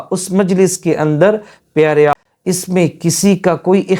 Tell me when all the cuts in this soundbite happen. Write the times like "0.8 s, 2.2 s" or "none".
2.1 s